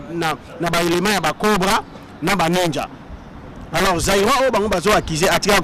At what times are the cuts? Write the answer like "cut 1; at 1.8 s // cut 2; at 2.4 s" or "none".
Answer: none

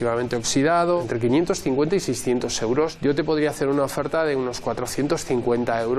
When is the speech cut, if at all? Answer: cut 1; at 1.0 s // cut 2; at 3.0 s

